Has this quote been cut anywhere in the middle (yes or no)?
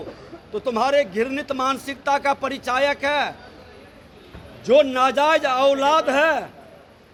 no